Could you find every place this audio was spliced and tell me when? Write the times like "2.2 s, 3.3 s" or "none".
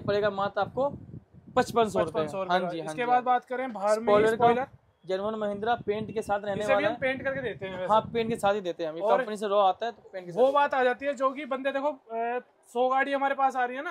none